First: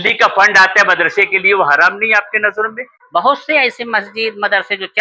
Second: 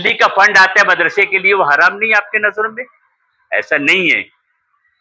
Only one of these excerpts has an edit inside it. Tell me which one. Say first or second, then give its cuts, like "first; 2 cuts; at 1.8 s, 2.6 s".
first; 1 cut; at 2.9 s